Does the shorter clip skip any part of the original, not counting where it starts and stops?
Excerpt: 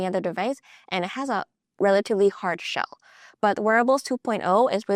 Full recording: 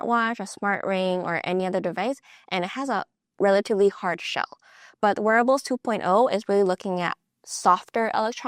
no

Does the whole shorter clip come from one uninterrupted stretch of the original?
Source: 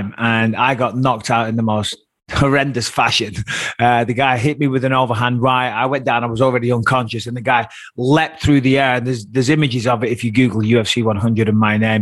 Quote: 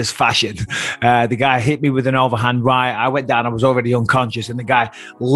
yes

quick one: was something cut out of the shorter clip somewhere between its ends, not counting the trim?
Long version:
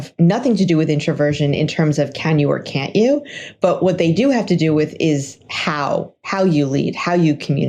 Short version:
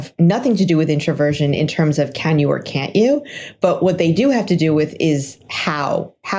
no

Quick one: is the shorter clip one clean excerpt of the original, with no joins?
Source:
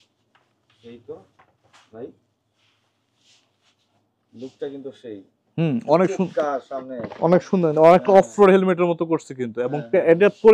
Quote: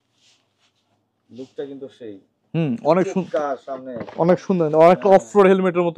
yes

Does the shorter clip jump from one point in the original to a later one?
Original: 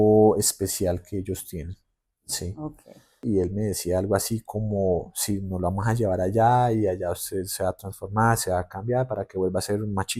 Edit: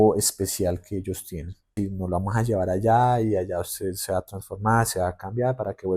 yes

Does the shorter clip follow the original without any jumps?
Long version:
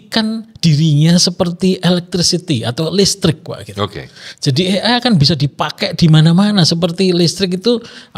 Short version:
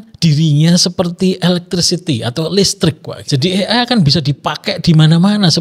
no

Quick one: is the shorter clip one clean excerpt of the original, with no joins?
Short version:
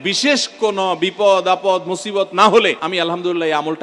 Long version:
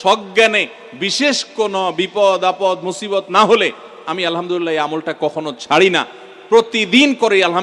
no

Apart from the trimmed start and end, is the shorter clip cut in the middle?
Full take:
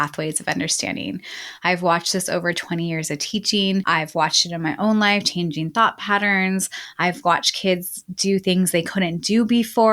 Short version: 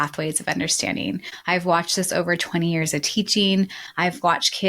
yes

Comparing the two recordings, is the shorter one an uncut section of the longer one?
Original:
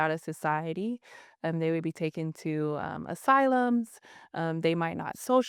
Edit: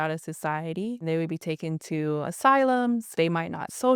no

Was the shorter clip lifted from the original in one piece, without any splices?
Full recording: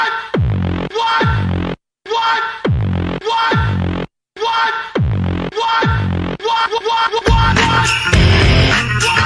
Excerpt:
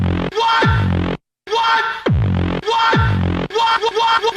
no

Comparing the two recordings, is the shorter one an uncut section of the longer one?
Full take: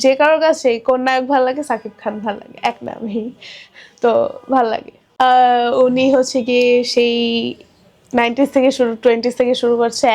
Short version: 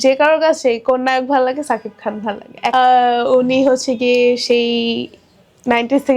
no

